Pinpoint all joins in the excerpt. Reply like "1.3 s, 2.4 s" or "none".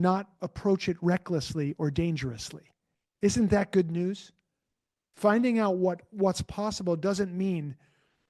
none